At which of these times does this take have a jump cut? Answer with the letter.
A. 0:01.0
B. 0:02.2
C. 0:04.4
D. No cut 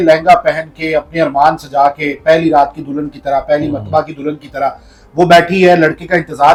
D